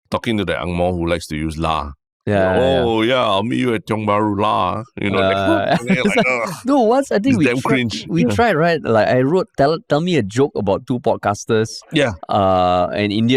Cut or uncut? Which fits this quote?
uncut